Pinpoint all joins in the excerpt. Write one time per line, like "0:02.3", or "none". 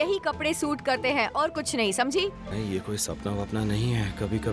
0:02.4